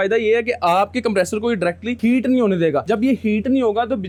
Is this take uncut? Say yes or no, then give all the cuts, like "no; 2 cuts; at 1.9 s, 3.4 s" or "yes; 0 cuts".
yes; 0 cuts